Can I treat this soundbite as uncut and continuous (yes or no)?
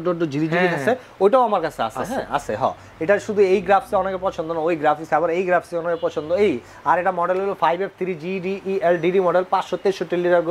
yes